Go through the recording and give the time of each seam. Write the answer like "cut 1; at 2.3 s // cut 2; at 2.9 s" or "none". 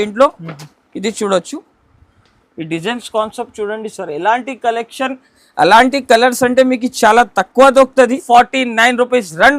cut 1; at 8.2 s